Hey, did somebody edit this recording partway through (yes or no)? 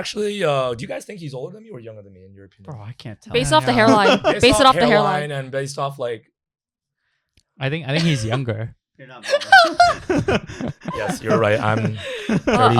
no